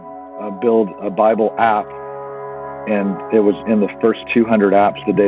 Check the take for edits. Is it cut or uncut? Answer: cut